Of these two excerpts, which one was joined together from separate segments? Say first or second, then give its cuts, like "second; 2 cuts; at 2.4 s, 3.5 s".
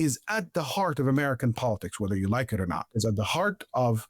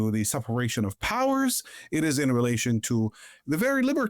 first; 1 cut; at 2.9 s